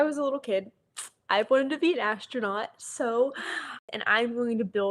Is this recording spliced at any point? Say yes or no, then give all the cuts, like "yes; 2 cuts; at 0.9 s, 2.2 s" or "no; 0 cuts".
yes; 1 cut; at 3.8 s